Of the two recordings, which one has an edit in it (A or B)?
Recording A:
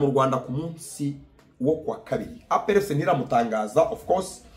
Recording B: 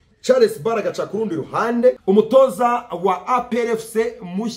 B